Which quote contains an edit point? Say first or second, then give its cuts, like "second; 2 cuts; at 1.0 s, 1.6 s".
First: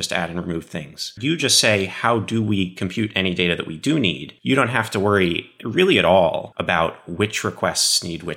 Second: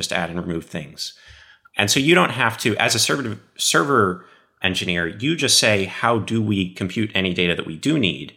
first; 3 cuts; at 1.1 s, 4.3 s, 6.5 s